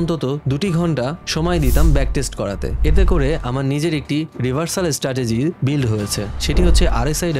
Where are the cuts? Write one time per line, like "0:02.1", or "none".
none